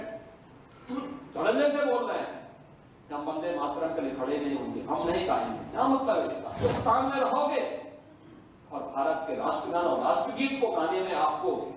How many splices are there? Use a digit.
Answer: 1